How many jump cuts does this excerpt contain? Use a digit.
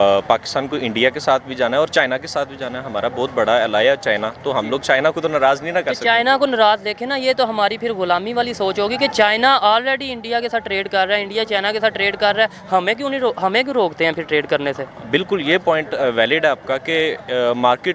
0